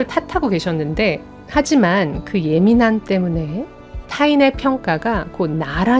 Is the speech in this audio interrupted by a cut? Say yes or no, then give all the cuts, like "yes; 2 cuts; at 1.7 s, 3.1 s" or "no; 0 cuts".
yes; 1 cut; at 1.3 s